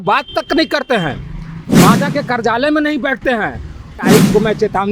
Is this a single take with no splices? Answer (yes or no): no